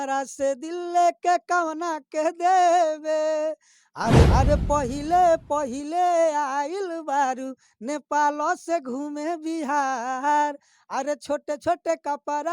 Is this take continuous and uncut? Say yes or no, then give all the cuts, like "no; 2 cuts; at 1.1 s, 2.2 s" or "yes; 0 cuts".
no; 1 cut; at 4.3 s